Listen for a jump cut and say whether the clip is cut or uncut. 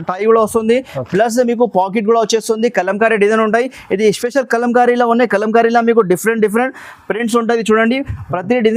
uncut